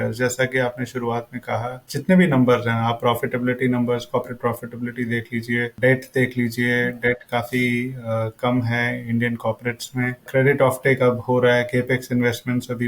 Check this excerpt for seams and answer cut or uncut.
cut